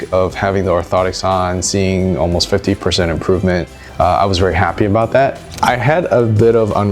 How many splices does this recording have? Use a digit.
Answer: 2